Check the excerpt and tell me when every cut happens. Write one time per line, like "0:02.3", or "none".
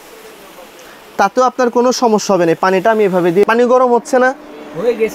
0:03.4

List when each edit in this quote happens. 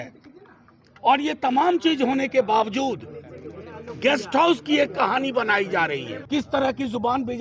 0:06.1

